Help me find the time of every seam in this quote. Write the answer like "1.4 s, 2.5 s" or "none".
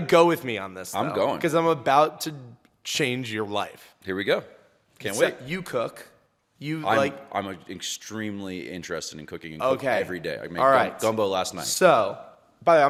none